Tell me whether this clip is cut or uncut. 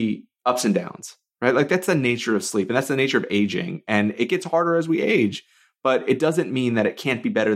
uncut